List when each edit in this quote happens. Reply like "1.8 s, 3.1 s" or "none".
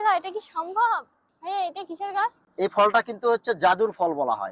1.2 s, 2.4 s